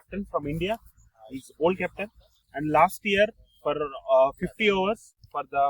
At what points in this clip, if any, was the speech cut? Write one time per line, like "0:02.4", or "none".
none